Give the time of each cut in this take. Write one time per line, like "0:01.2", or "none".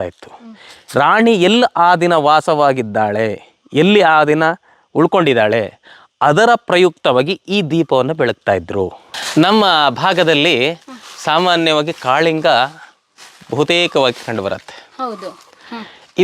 0:09.1